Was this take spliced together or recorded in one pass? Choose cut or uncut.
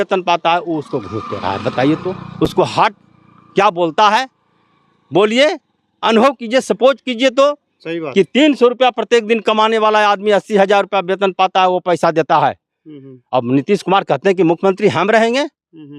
uncut